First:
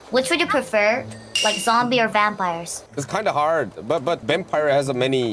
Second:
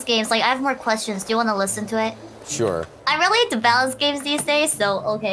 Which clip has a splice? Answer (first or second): first